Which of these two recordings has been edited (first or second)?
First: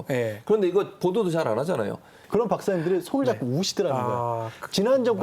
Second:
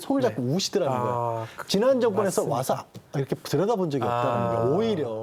first